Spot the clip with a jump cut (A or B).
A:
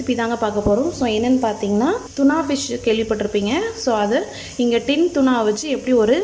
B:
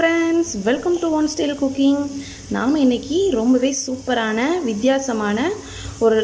A